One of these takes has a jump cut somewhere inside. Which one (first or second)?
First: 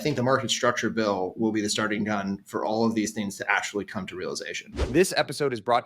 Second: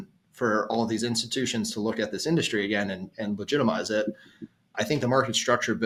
first